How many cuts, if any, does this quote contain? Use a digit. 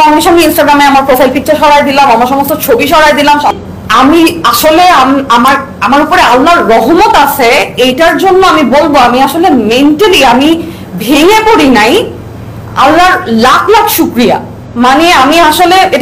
1